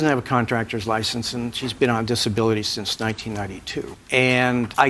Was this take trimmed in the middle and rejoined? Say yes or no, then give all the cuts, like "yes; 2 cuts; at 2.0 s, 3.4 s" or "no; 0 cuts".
no; 0 cuts